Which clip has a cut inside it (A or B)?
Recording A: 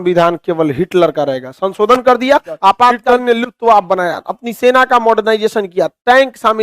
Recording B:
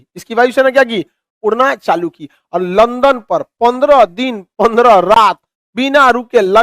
A